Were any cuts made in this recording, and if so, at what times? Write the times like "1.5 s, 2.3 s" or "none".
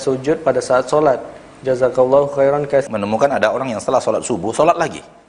2.9 s